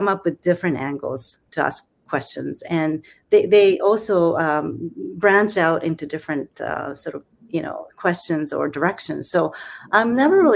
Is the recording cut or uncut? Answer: uncut